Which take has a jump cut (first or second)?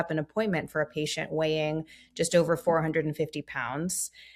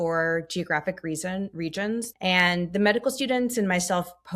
second